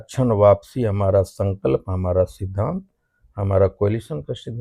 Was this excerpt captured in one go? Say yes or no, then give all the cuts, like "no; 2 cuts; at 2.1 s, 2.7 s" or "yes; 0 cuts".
yes; 0 cuts